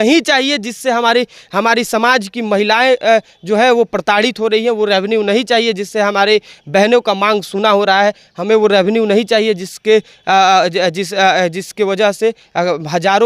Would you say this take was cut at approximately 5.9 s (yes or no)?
no